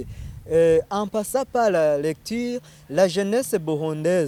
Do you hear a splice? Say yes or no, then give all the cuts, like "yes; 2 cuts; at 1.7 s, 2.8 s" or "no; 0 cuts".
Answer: no; 0 cuts